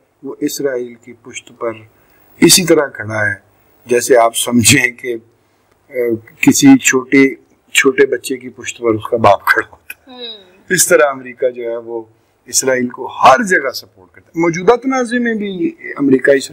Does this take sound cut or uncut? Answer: uncut